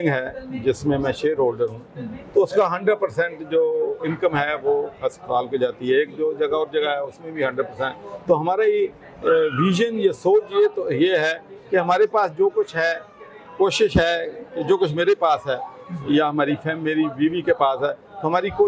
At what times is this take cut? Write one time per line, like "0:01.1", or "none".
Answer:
none